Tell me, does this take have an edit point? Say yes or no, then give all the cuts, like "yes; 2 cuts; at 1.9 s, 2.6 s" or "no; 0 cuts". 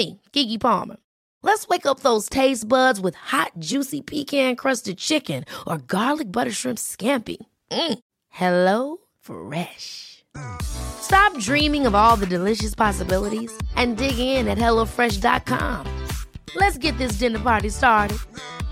no; 0 cuts